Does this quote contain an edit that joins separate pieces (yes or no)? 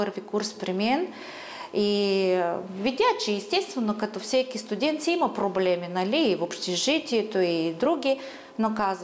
no